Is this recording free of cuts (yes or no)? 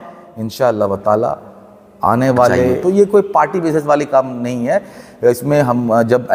no